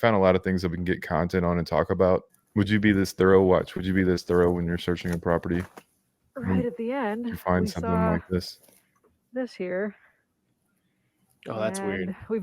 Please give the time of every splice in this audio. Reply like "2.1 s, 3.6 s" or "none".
2.3 s

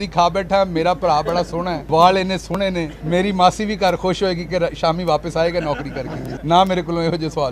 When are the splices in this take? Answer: 1.8 s, 2.9 s, 6.3 s

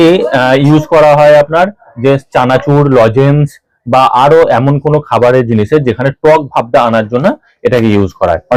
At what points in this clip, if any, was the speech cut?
none

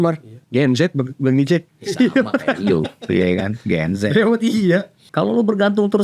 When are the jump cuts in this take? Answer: 5.0 s

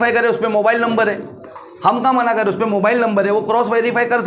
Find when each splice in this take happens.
none

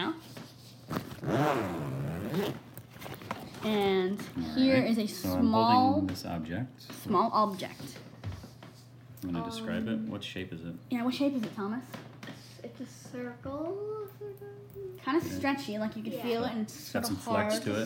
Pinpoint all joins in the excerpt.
1.6 s

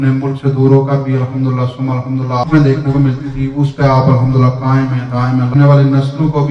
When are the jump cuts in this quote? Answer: 2.5 s, 5.6 s

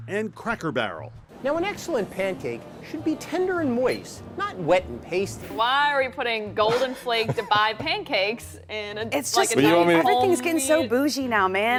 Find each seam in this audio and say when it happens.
none

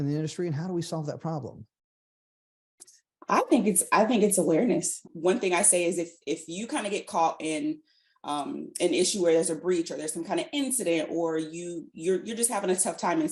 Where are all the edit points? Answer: 5.0 s

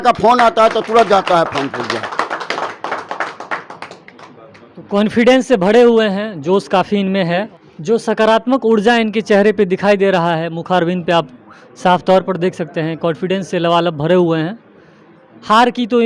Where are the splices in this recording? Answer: 7.5 s

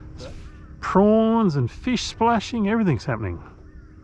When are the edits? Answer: none

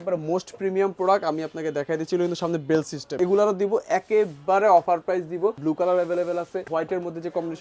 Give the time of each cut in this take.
3.2 s, 5.6 s, 6.7 s

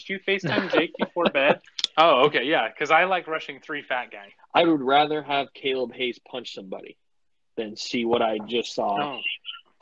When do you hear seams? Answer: 1.8 s, 4.2 s

